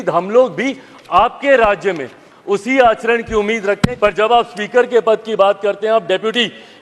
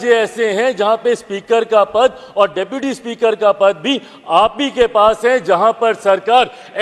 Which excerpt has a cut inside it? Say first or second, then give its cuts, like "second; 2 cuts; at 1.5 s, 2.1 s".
first; 1 cut; at 3.9 s